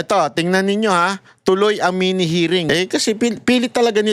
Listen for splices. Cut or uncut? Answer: cut